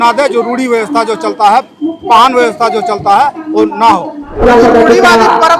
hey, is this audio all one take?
no; 1 cut; at 4.4 s

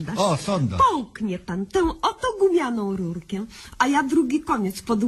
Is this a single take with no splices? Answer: no; 1 cut; at 1.8 s

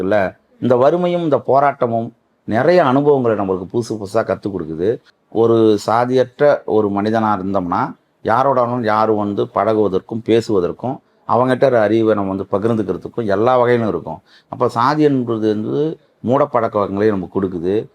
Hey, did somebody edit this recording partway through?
yes; 1 cut; at 5.1 s

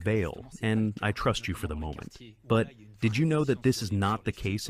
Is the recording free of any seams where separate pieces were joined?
yes; 0 cuts

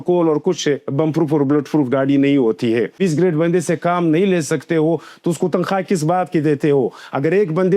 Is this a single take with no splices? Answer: no; 1 cut; at 2.9 s

